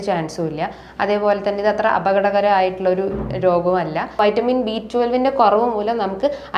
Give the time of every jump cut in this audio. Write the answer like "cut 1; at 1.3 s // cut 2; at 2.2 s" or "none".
cut 1; at 4.2 s